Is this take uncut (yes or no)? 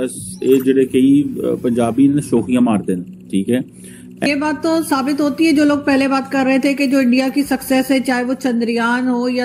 no